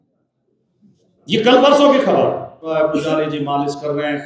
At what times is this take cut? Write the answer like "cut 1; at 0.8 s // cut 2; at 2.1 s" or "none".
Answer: cut 1; at 2.7 s